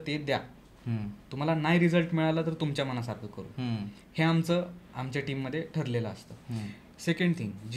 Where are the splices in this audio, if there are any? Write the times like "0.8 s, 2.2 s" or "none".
none